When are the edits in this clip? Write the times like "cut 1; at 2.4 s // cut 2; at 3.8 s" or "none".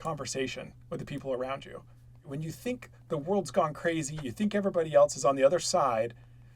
cut 1; at 2.2 s